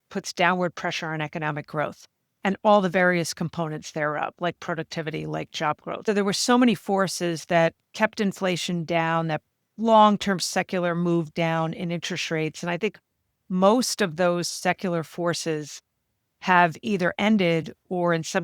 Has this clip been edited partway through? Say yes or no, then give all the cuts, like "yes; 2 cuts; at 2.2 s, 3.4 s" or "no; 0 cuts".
yes; 1 cut; at 6.0 s